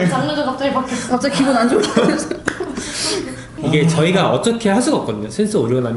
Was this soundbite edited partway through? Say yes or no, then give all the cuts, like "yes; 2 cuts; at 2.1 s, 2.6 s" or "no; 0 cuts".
no; 0 cuts